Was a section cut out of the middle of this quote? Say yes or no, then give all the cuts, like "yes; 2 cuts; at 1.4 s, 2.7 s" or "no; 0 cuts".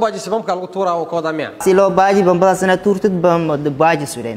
yes; 1 cut; at 1.6 s